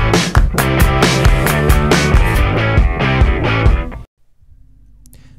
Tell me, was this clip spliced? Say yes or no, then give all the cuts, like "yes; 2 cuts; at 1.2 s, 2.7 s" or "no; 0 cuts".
no; 0 cuts